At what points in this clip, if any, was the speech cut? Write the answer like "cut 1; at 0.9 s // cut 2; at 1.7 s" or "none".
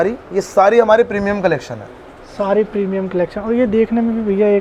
none